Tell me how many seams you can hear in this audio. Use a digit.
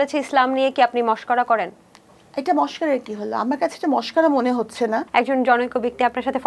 1